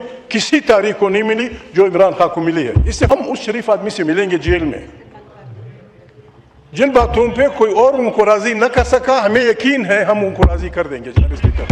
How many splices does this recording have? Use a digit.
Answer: 1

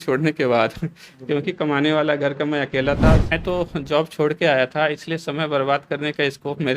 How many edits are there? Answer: 1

